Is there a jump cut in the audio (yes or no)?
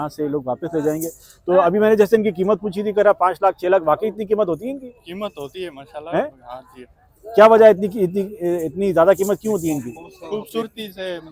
no